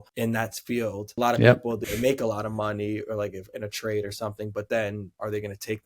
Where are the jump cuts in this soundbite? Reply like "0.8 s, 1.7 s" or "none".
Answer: 1.1 s, 1.8 s